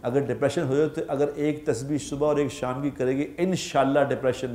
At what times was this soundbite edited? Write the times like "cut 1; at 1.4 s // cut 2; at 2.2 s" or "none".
none